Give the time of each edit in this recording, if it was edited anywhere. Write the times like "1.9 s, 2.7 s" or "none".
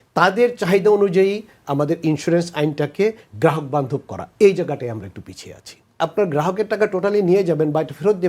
6.0 s